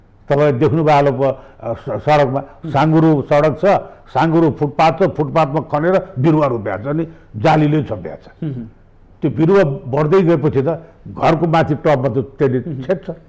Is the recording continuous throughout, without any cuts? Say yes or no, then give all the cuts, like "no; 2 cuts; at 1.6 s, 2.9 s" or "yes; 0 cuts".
yes; 0 cuts